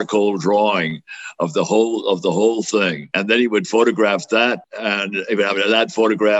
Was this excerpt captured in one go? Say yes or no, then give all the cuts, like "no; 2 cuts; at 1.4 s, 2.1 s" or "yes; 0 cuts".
no; 2 cuts; at 3.1 s, 4.7 s